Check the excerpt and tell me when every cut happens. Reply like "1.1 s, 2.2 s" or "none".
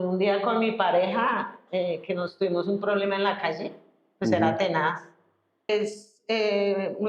5.7 s